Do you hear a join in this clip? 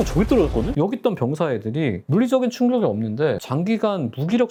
no; 0 cuts

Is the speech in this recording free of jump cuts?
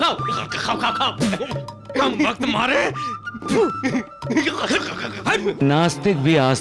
no; 1 cut; at 5.6 s

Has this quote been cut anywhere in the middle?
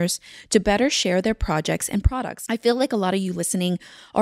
no; 0 cuts

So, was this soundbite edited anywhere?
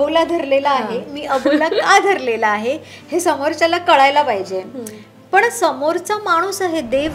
no; 0 cuts

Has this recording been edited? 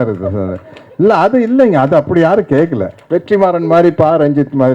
yes; 1 cut; at 2.9 s

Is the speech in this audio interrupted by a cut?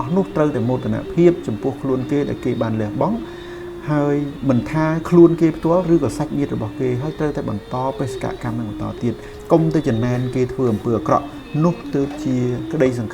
yes; 1 cut; at 9.3 s

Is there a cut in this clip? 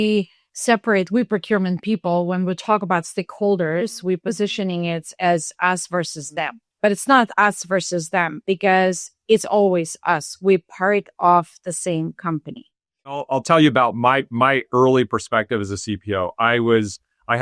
yes; 2 cuts; at 6.6 s, 13.2 s

